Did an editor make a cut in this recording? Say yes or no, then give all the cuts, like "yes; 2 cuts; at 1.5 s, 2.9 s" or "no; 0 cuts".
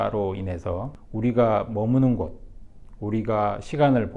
no; 0 cuts